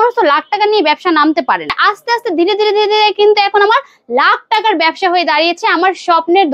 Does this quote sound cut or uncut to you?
cut